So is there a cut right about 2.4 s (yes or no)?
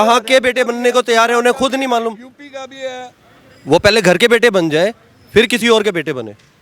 no